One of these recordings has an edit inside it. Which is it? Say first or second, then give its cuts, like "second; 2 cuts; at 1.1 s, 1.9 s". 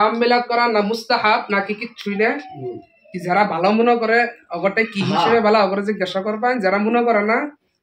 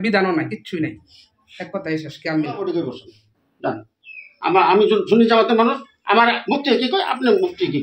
second; 1 cut; at 2.6 s